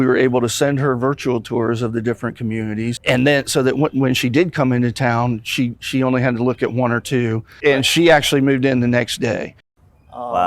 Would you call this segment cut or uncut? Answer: cut